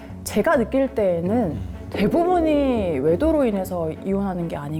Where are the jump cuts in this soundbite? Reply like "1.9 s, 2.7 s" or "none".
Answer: none